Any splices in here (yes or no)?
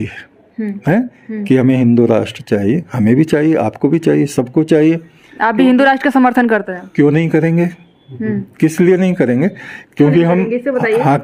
no